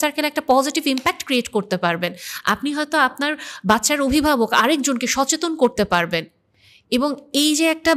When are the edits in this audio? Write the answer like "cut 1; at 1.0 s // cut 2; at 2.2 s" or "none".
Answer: none